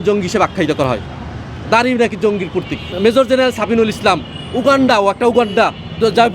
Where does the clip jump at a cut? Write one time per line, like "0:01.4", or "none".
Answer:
none

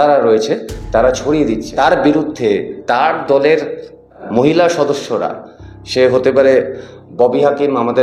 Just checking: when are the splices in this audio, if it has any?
0:01.7
0:04.2

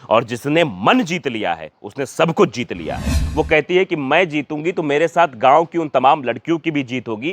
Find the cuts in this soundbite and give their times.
0:03.1

